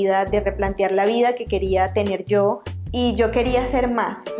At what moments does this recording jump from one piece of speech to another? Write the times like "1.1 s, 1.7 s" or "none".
2.7 s